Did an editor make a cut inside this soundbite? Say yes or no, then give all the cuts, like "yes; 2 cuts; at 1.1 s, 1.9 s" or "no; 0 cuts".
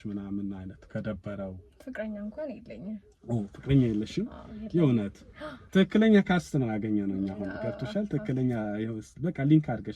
yes; 1 cut; at 5.5 s